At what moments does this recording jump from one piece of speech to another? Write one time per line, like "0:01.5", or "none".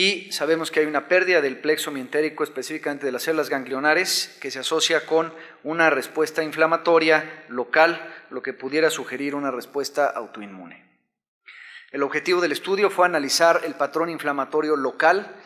none

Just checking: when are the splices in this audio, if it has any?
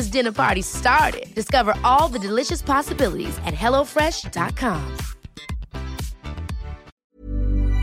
0:06.9

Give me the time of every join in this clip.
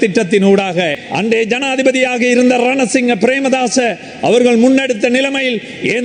0:01.0

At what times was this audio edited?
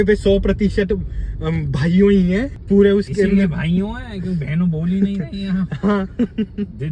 none

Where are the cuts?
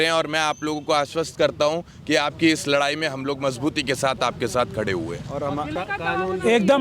0:05.7

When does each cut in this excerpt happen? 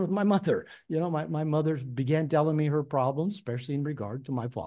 none

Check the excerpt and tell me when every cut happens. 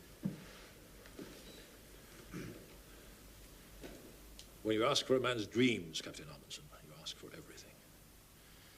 0:01.0

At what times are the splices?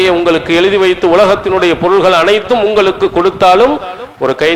none

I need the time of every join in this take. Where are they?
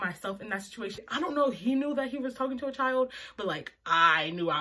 none

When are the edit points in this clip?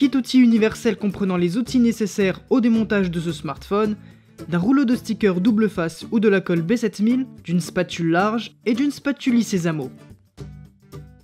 0:10.3

